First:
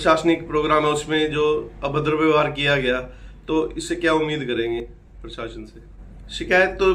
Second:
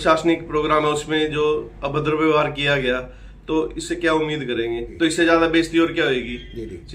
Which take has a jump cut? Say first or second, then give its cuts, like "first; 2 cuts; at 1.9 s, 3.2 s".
second; 1 cut; at 4.8 s